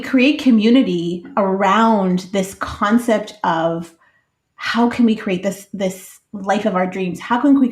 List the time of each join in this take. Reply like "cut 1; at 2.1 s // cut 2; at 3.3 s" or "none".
cut 1; at 1.3 s